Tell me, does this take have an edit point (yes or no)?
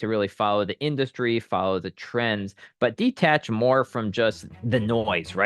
yes